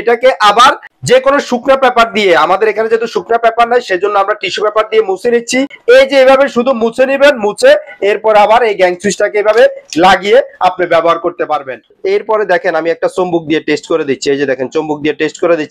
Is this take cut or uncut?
cut